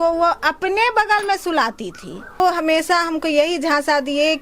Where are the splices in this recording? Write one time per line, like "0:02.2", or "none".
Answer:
0:02.4

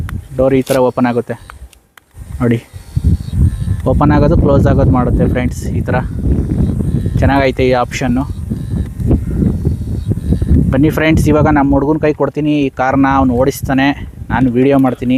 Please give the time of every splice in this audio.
none

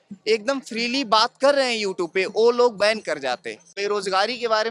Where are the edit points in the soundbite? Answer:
0:03.8

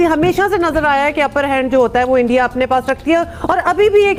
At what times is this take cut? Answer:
none

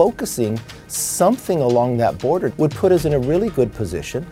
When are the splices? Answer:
0:02.5

